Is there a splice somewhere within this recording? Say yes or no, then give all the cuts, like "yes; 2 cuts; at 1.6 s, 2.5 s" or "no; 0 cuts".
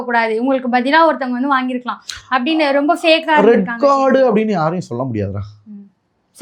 no; 0 cuts